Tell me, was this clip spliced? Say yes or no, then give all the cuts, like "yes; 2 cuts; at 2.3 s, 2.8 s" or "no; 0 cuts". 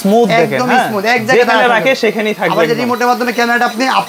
no; 0 cuts